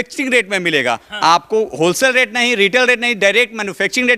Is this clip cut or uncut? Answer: uncut